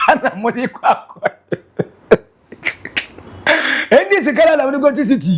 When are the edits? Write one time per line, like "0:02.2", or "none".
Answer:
none